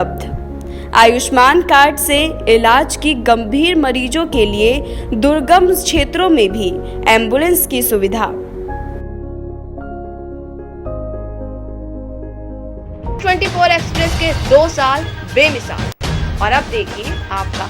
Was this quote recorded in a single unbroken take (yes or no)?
no